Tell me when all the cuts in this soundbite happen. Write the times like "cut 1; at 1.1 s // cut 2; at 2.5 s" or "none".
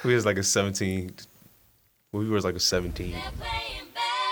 cut 1; at 3.3 s